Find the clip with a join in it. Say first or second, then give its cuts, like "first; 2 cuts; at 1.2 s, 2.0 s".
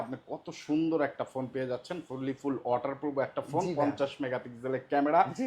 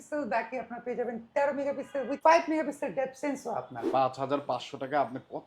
second; 2 cuts; at 2.2 s, 3.8 s